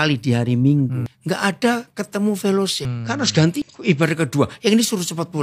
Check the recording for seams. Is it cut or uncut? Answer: cut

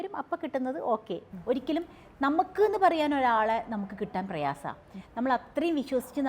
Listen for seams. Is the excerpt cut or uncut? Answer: cut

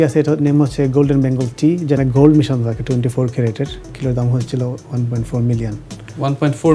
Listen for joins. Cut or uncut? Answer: cut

